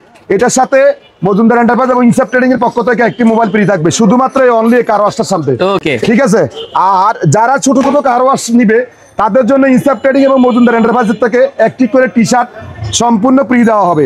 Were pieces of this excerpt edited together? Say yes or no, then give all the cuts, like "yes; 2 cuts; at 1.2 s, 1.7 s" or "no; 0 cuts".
no; 0 cuts